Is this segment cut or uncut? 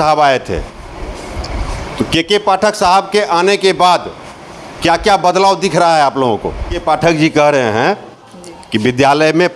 cut